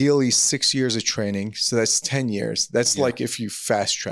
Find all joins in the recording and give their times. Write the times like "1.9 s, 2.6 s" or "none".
none

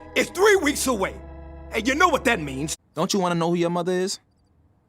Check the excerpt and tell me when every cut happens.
2.7 s

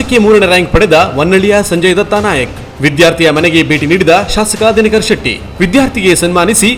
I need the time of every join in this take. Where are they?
none

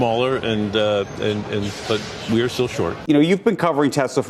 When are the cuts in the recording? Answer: 3.0 s

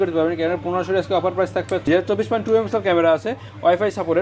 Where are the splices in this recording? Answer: 1.9 s

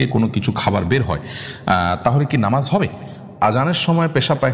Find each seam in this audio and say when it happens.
3.3 s

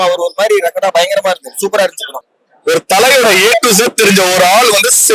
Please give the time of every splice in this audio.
2.2 s

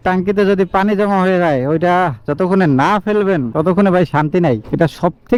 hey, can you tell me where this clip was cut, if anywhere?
none

